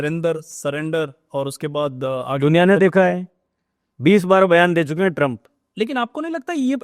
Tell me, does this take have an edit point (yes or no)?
no